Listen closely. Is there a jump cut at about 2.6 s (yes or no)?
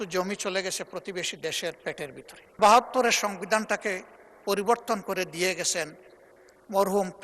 yes